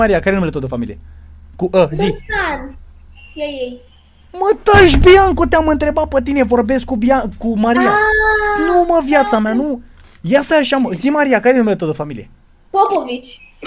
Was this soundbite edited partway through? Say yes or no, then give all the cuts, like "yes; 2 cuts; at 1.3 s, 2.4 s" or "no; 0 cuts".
no; 0 cuts